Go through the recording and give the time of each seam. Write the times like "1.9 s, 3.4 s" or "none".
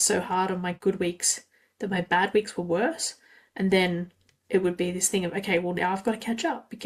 none